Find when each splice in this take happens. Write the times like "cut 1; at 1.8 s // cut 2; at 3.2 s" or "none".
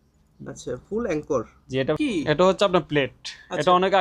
cut 1; at 2.0 s